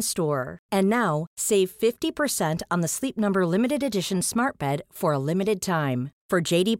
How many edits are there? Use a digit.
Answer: 0